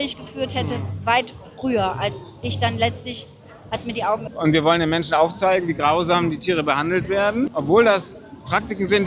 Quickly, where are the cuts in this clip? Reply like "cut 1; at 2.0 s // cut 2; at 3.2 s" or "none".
cut 1; at 4.2 s // cut 2; at 7.5 s